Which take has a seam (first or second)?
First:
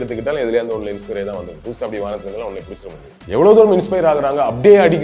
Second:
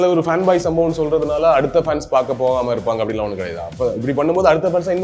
first